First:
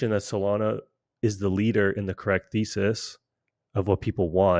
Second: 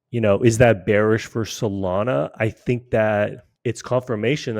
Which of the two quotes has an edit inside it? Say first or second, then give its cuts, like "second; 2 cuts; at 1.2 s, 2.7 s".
second; 1 cut; at 3.5 s